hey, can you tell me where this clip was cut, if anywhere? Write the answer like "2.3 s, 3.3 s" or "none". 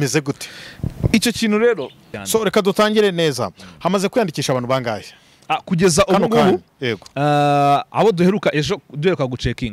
2.1 s

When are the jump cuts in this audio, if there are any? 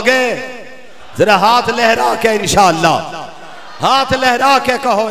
none

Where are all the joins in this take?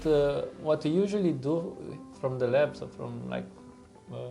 none

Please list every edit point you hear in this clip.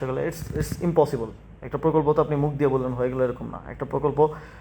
none

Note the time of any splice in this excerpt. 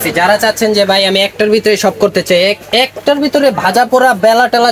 none

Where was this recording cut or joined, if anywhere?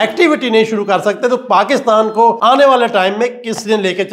2.4 s

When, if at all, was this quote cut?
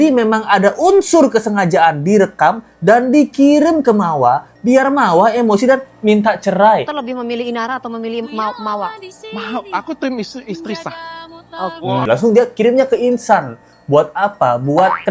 7.0 s, 12.1 s

